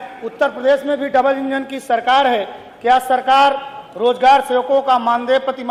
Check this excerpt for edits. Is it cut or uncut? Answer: uncut